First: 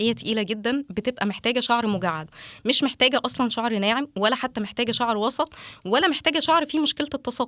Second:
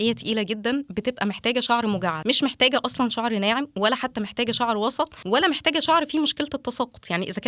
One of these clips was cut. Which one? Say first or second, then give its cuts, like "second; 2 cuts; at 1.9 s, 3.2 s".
second; 2 cuts; at 2.2 s, 5.2 s